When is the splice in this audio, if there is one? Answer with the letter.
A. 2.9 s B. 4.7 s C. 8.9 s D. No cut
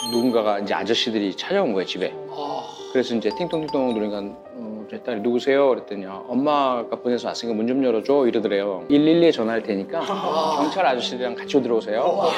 C